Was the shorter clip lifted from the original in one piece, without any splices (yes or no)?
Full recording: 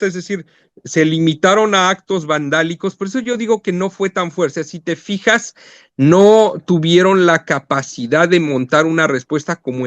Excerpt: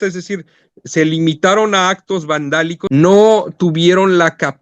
no